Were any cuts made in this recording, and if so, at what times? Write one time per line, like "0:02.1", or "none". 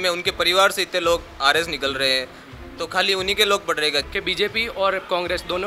0:04.1